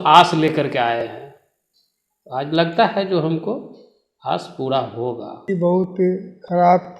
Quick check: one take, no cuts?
no; 1 cut; at 5.5 s

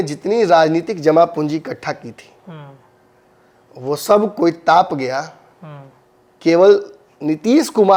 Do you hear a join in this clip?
no; 0 cuts

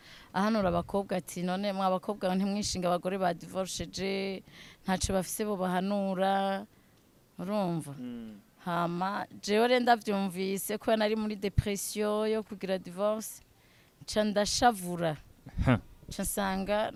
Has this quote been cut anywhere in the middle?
no; 0 cuts

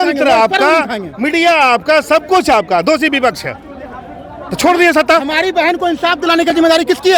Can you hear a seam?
no; 0 cuts

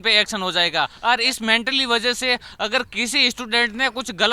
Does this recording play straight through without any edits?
no; 1 cut; at 1.0 s

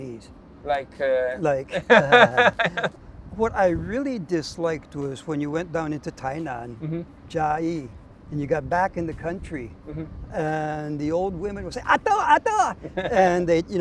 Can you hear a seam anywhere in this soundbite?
no; 0 cuts

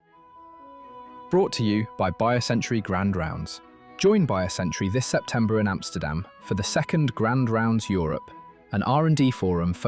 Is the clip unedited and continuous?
no; 1 cut; at 1.3 s

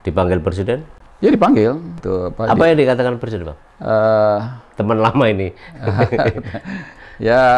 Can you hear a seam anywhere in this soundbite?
yes; 2 cuts; at 0.9 s, 1.9 s

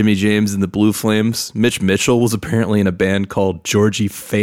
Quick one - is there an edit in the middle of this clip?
no; 0 cuts

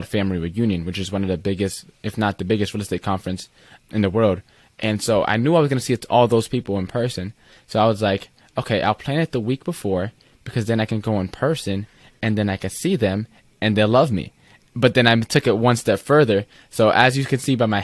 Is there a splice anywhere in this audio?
no; 0 cuts

